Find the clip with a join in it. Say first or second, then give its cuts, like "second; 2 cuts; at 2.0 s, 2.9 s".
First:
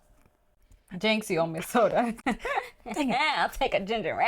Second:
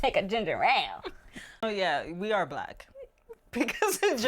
second; 1 cut; at 1.6 s